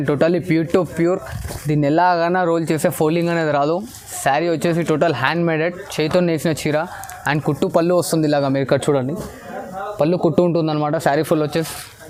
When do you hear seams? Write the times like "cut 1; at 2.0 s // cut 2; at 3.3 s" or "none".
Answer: none